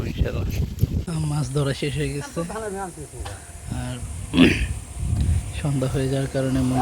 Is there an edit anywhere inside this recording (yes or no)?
yes